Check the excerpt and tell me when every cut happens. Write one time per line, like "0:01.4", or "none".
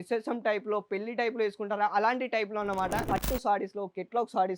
0:03.0